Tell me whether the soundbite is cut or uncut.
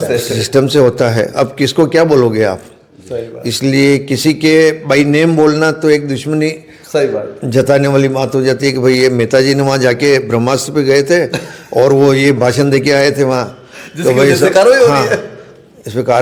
uncut